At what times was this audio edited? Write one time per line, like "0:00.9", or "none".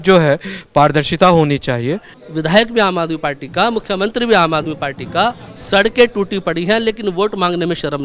0:02.1